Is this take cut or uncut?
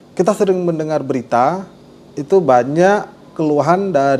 uncut